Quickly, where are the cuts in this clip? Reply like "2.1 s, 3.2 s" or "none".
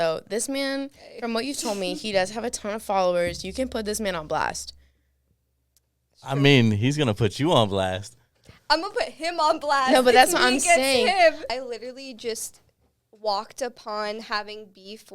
11.4 s